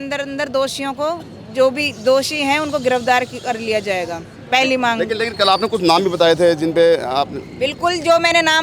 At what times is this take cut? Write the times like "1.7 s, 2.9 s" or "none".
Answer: none